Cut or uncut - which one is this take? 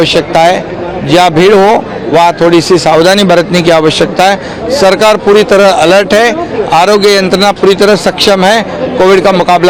uncut